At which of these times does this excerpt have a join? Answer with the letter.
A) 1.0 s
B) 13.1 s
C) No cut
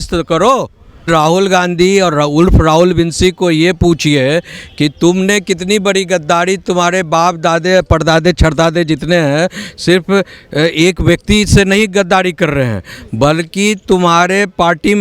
A